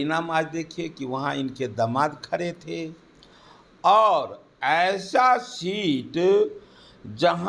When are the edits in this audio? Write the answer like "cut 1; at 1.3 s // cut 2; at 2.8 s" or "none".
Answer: none